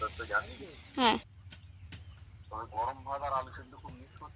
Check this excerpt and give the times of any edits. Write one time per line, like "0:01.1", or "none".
0:01.3

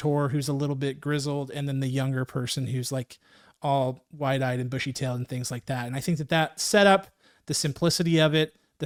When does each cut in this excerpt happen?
none

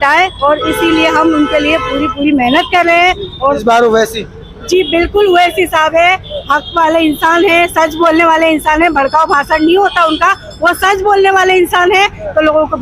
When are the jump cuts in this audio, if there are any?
0:03.6

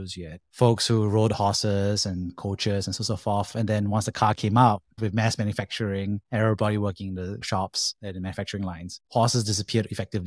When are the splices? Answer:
0:09.0

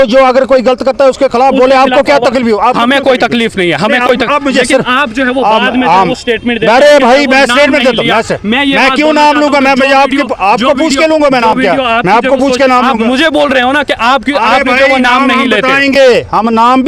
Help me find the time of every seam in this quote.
none

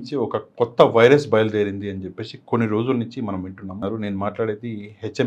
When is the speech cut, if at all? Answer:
0:03.7

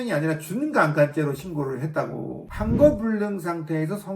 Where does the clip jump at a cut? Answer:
0:02.5

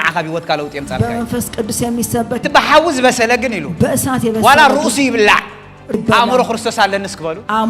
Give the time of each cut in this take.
0:02.4
0:05.9

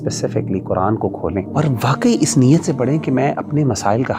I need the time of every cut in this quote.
0:01.5

